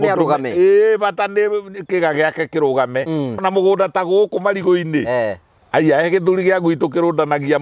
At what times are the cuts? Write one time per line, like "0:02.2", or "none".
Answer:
0:03.4